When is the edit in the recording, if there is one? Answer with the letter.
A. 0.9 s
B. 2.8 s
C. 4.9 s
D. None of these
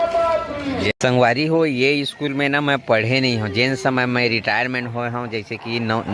A